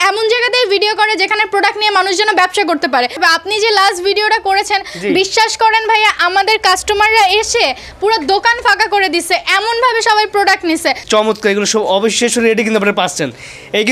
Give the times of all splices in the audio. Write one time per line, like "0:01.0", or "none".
0:03.2
0:11.0